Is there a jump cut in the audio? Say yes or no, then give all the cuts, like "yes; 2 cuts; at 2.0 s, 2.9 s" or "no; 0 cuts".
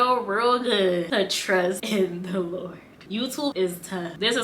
yes; 1 cut; at 1.8 s